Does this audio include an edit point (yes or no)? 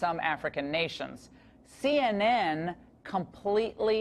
no